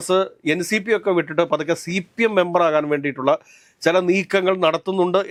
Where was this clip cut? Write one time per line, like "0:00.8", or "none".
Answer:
none